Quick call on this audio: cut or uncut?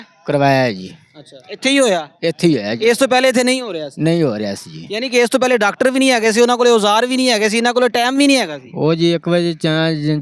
uncut